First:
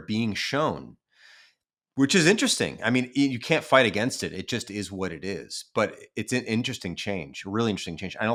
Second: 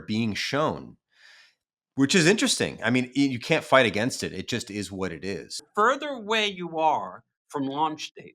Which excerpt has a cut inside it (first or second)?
second